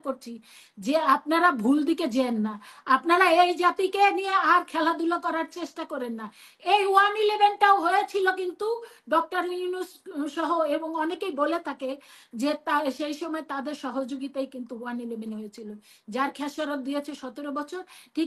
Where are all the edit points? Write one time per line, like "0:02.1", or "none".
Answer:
none